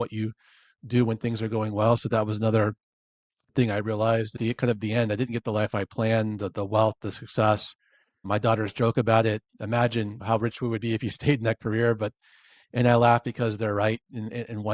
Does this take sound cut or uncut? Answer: cut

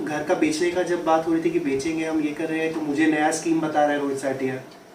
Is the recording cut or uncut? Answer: uncut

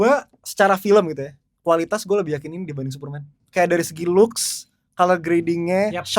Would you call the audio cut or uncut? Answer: cut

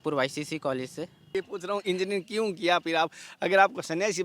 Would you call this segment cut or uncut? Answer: cut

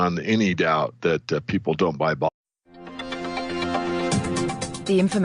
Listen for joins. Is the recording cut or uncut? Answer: uncut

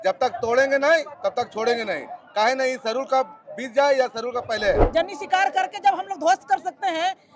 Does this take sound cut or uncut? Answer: cut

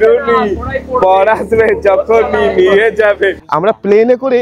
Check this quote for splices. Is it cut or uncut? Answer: cut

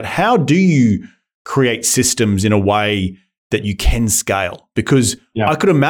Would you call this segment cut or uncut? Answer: uncut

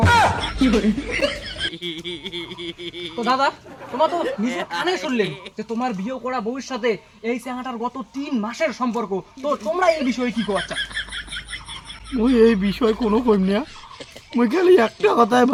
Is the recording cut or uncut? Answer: uncut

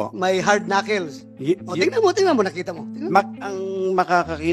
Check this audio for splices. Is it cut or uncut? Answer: uncut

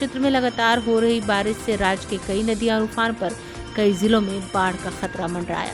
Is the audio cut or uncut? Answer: uncut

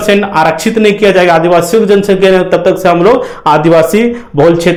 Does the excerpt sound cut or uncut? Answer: uncut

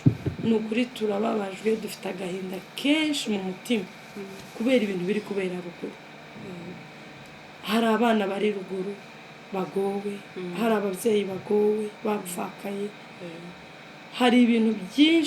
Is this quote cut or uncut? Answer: uncut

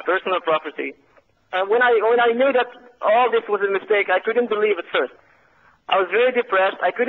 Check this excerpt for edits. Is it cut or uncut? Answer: uncut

